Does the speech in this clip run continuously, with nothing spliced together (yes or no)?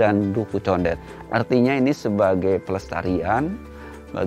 no